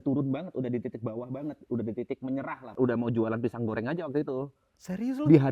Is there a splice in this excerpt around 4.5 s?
no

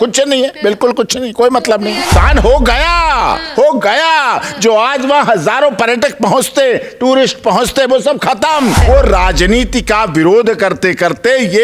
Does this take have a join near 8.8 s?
yes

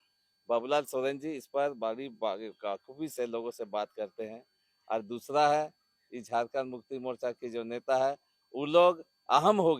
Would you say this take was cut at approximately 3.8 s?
no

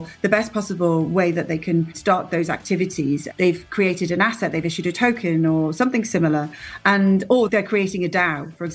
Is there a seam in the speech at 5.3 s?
no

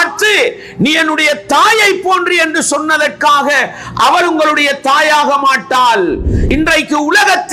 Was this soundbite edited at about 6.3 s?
yes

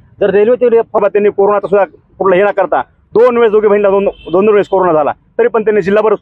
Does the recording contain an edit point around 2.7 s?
no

